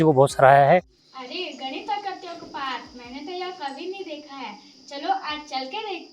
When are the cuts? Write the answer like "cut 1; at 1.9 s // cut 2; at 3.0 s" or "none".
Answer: cut 1; at 1.0 s